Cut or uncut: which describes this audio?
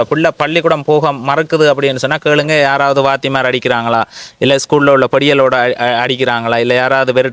uncut